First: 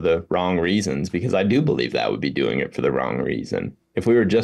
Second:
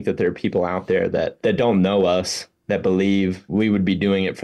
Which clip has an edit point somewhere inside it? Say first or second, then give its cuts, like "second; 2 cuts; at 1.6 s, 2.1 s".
second; 2 cuts; at 1.3 s, 3.5 s